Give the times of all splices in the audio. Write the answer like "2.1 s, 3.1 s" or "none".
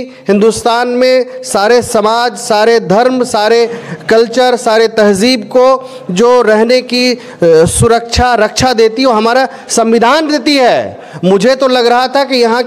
none